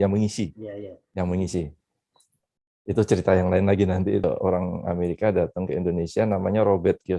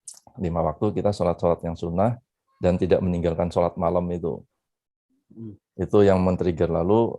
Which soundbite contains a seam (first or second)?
first